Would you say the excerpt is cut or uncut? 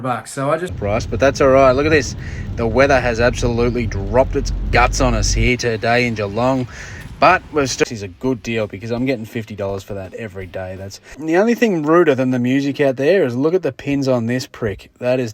cut